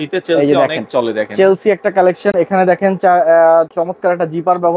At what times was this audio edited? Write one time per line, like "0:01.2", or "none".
none